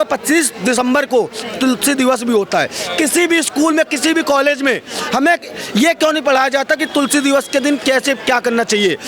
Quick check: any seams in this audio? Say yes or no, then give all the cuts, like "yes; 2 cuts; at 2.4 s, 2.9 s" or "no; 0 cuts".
no; 0 cuts